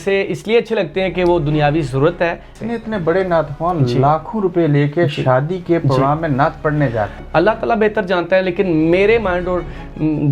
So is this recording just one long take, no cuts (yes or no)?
no